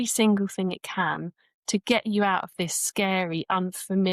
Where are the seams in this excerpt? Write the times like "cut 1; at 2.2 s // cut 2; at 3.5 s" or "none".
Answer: none